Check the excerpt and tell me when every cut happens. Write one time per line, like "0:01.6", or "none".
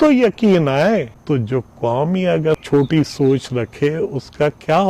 0:01.1
0:02.5